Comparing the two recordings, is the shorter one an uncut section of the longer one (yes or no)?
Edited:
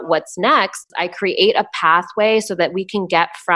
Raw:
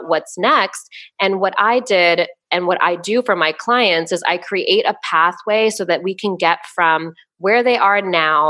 no